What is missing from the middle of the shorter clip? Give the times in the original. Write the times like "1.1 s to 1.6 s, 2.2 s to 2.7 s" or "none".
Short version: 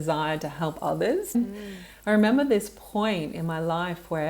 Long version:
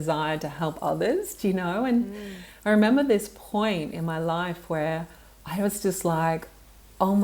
1.4 s to 1.9 s